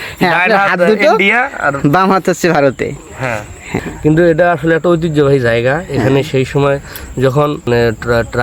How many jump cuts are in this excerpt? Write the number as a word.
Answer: two